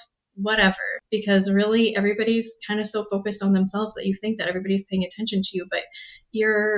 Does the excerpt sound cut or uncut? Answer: cut